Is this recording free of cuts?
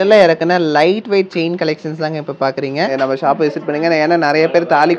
no; 1 cut; at 2.9 s

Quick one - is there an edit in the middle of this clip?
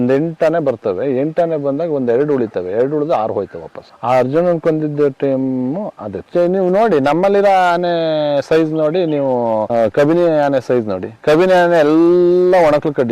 yes; 1 cut; at 6.2 s

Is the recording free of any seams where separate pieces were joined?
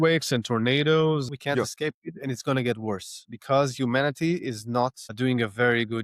no; 2 cuts; at 1.3 s, 3.3 s

